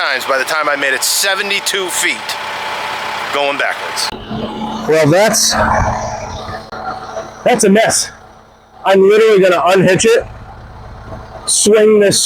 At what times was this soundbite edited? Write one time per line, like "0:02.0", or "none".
0:04.1